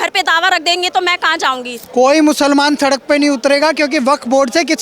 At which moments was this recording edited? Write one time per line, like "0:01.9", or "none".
0:01.7